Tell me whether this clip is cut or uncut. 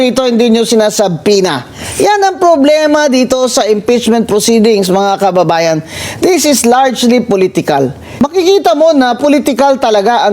cut